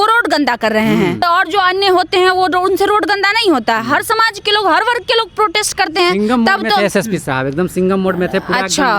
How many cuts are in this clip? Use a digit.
1